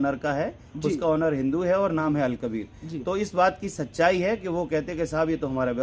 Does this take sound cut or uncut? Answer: uncut